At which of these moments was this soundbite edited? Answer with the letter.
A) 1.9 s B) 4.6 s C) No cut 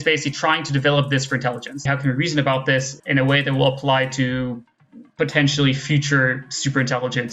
A